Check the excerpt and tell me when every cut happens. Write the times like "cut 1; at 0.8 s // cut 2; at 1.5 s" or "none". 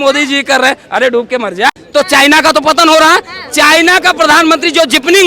cut 1; at 1.7 s